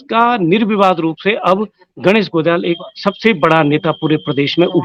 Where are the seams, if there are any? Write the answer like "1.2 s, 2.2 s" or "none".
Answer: none